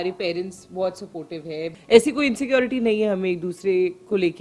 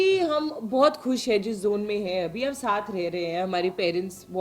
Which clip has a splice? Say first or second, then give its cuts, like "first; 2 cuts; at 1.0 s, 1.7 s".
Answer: first; 1 cut; at 1.8 s